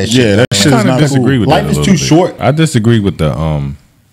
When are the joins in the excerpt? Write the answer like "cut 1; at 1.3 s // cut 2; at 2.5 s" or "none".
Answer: cut 1; at 2.4 s